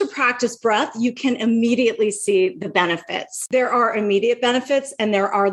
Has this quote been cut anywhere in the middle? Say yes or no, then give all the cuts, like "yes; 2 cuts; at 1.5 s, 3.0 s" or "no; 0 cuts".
yes; 1 cut; at 3.4 s